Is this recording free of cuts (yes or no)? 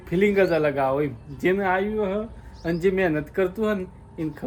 yes